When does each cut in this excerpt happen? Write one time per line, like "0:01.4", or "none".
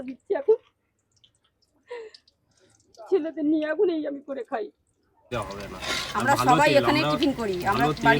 0:05.3